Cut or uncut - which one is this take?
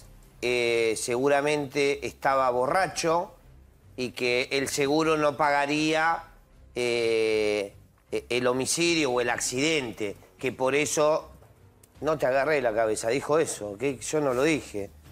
uncut